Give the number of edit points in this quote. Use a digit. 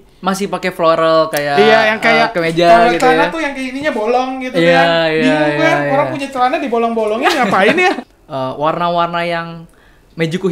1